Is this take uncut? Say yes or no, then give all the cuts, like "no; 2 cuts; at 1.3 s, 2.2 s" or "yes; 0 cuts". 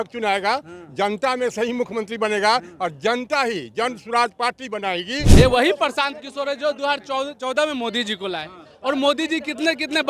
no; 1 cut; at 5.3 s